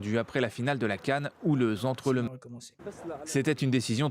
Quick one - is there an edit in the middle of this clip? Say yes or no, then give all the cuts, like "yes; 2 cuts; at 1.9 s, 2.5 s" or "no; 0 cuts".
yes; 1 cut; at 2.3 s